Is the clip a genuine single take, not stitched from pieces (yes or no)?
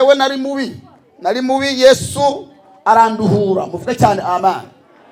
yes